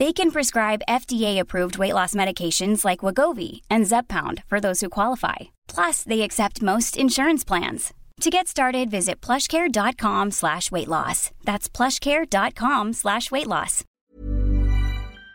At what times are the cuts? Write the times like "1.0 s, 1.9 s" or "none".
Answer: 14.0 s